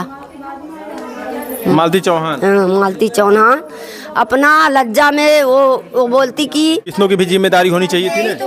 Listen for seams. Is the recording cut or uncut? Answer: cut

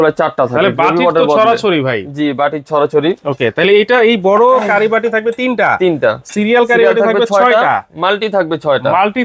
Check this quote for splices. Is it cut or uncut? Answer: uncut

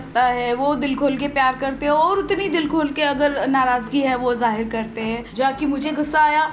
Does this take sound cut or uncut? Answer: cut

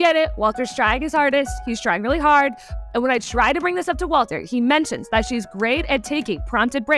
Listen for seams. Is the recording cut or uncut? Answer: cut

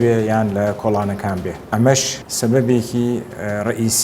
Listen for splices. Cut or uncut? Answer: cut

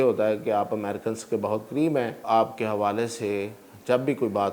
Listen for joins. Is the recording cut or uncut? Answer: cut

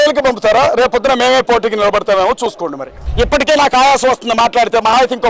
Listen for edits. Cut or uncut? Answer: cut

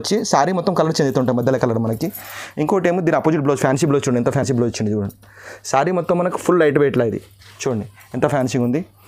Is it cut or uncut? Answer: uncut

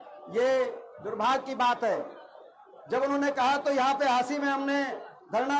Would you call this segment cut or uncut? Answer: uncut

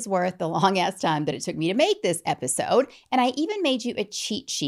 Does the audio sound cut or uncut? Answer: uncut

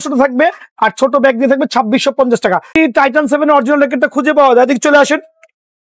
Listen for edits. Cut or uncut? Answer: cut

